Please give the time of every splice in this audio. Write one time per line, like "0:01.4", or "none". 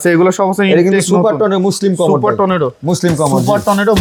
none